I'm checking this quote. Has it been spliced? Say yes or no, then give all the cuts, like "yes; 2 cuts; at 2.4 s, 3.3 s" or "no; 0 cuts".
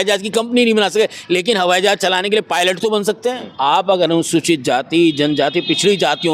yes; 1 cut; at 3.5 s